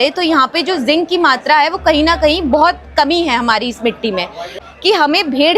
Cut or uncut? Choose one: cut